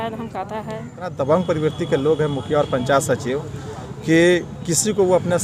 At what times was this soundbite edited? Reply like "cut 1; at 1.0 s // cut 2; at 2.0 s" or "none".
cut 1; at 1.1 s